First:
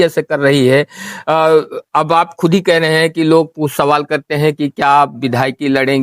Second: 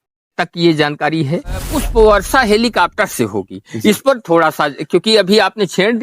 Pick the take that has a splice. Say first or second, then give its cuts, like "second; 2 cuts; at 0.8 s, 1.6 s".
second; 1 cut; at 1.7 s